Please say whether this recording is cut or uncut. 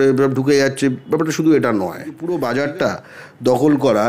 cut